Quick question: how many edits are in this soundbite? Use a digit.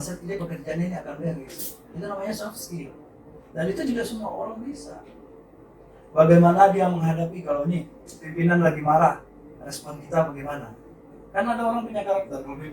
0